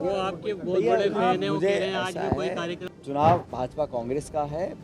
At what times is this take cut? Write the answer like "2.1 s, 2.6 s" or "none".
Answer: 2.8 s